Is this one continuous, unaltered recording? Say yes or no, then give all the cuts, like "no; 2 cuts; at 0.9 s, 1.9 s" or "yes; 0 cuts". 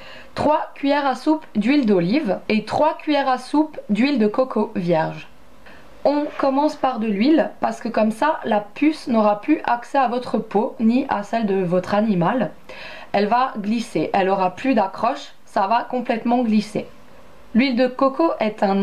no; 1 cut; at 6.1 s